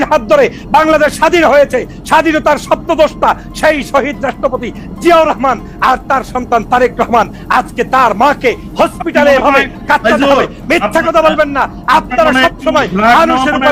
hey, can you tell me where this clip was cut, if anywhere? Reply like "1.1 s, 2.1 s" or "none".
none